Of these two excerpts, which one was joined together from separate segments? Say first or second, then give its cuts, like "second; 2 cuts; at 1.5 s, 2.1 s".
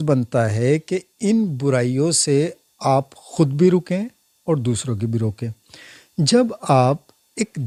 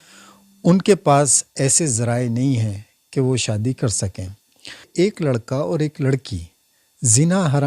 second; 1 cut; at 4.9 s